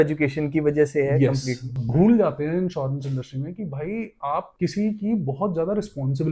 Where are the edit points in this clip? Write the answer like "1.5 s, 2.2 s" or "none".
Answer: 1.8 s, 4.5 s